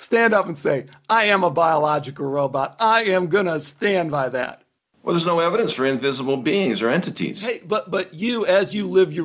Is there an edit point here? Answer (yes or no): no